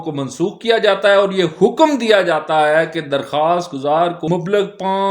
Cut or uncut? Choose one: cut